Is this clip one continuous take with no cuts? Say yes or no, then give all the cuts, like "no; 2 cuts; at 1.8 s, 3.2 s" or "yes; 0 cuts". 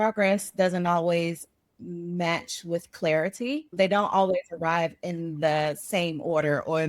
no; 1 cut; at 3.7 s